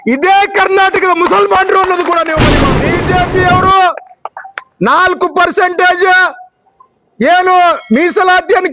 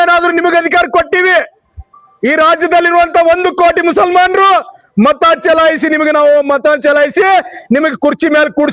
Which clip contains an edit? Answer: first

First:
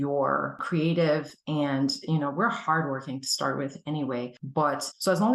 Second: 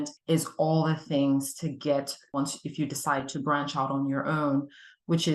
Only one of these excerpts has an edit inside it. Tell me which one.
second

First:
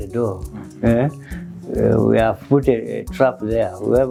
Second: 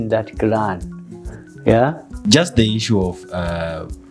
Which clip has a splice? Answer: second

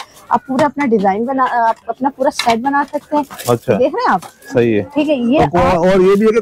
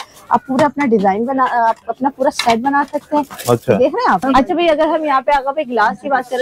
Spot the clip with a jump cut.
second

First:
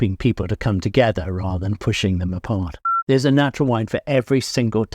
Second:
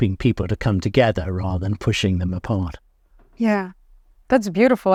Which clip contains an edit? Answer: first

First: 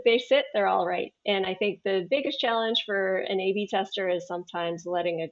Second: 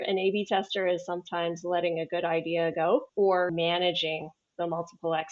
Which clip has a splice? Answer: second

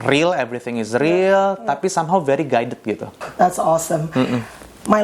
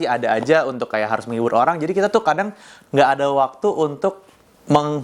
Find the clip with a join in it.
first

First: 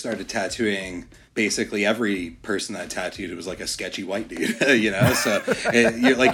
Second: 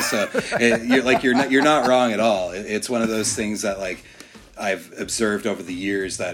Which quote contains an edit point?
first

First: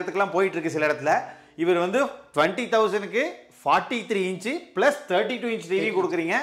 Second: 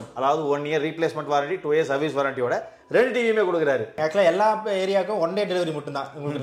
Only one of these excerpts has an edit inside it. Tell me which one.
second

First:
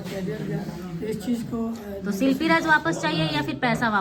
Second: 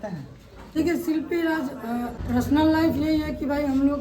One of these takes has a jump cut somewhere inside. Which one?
second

